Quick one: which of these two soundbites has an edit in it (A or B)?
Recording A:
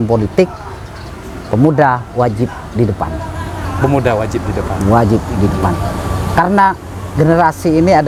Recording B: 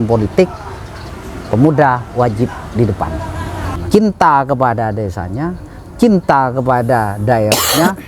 B